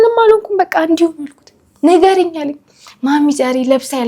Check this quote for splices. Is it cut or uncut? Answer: uncut